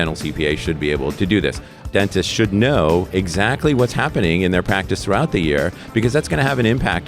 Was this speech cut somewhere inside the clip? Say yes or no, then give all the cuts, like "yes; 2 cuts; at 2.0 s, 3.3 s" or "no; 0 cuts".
yes; 1 cut; at 1.9 s